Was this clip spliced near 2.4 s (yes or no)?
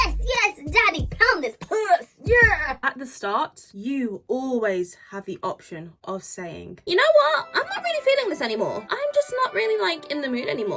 no